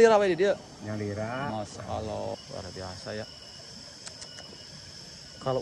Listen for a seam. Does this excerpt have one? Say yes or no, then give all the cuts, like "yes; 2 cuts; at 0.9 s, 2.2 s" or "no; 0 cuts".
yes; 1 cut; at 2.4 s